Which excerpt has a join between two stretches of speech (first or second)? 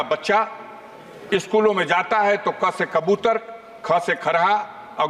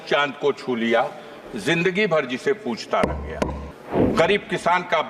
second